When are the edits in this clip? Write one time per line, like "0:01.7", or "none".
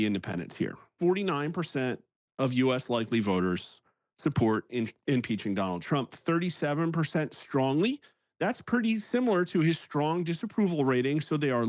0:00.9